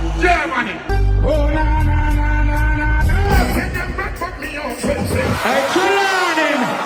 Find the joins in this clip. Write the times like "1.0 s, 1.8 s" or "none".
none